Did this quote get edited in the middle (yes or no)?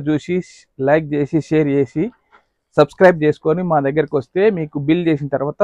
no